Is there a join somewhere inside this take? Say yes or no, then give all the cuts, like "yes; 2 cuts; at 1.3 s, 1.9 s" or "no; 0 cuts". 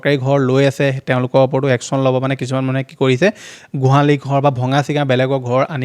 no; 0 cuts